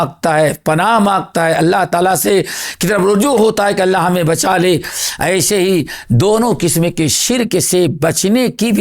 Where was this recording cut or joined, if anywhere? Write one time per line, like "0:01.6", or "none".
none